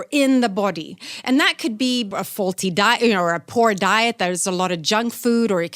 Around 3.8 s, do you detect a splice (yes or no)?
no